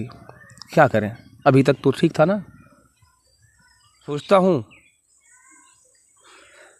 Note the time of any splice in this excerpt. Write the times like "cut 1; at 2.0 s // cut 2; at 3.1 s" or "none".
cut 1; at 4.2 s